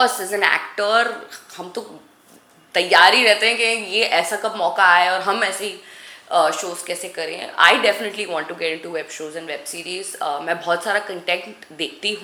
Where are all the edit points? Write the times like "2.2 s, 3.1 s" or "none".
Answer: none